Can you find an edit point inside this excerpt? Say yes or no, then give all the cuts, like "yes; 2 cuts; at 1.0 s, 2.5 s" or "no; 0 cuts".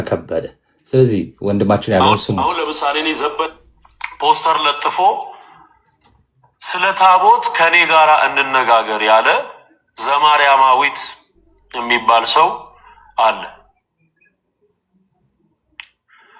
no; 0 cuts